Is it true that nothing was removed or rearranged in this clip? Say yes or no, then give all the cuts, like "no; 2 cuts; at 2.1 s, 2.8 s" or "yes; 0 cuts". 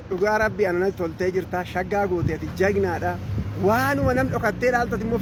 yes; 0 cuts